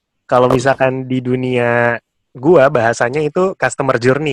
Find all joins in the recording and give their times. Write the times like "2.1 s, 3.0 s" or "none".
none

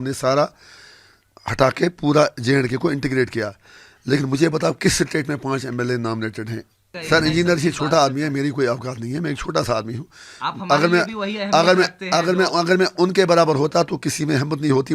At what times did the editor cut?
6.9 s

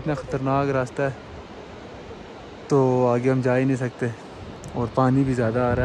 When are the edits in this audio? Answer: none

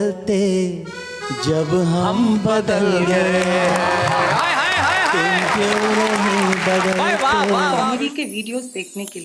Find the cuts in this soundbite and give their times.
7.8 s

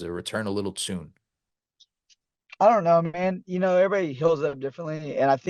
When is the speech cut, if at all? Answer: none

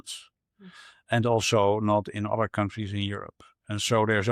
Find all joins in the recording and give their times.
none

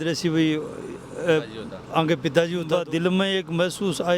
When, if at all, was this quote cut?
2.7 s

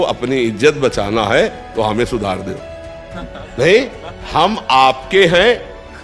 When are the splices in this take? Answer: none

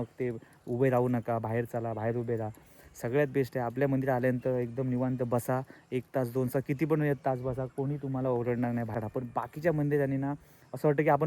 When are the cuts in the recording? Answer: 8.9 s

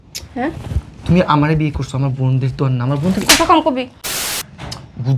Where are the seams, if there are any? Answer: 4.1 s

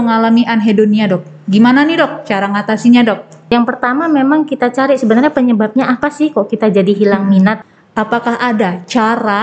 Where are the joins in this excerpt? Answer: 3.3 s, 7.6 s

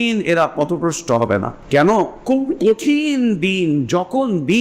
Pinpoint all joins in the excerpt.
1.6 s, 2.2 s

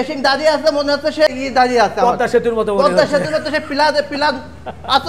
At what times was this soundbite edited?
1.3 s

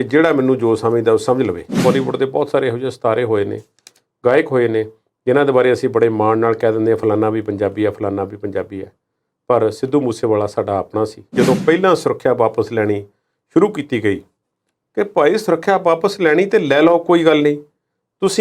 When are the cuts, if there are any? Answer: 1.8 s, 11.3 s

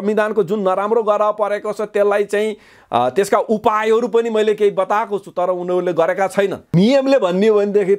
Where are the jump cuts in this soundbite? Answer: 6.7 s

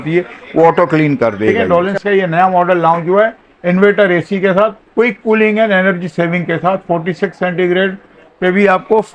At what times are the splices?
1.6 s

